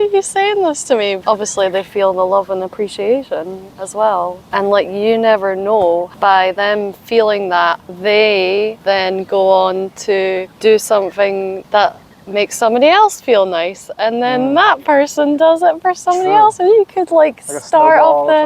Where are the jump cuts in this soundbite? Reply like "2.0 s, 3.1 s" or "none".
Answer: 1.2 s, 4.4 s, 6.1 s, 7.9 s, 8.8 s, 10.5 s, 11.6 s